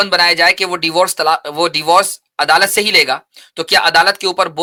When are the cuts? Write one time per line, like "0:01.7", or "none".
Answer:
none